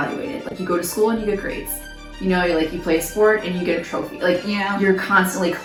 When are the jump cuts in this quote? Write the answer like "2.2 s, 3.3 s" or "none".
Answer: none